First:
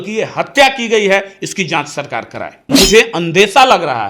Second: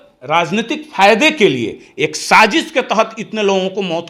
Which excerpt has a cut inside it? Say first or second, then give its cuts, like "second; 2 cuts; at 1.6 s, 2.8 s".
first; 1 cut; at 2.7 s